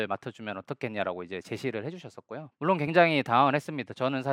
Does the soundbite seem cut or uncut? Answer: cut